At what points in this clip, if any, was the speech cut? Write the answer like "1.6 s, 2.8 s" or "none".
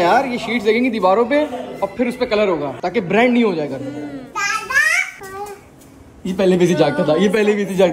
none